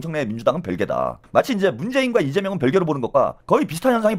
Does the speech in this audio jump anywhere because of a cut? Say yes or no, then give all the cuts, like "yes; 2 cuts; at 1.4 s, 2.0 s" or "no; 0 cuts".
no; 0 cuts